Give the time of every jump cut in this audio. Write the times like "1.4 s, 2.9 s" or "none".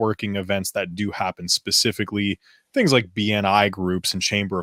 none